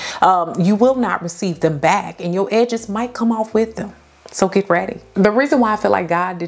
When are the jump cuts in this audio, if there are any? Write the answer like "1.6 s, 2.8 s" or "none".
5.1 s